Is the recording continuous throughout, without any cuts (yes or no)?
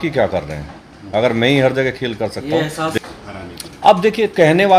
no